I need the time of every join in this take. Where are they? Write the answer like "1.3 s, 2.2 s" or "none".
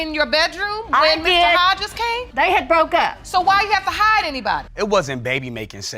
4.6 s